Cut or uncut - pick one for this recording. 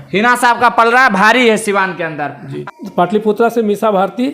cut